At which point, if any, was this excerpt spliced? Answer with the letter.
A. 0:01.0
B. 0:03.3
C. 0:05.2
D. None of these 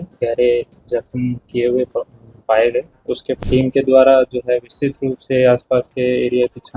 B